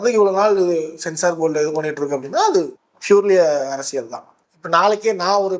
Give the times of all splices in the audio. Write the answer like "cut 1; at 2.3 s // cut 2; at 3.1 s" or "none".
cut 1; at 4.4 s